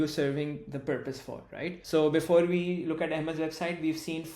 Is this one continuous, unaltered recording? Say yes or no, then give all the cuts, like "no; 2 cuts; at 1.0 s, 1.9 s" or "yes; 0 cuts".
no; 1 cut; at 1.8 s